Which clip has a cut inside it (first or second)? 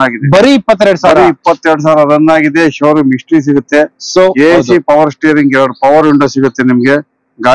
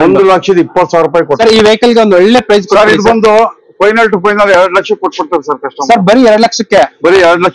second